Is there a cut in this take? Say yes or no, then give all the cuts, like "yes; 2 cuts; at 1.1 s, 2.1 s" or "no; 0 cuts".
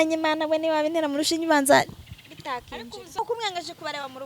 yes; 1 cut; at 3.2 s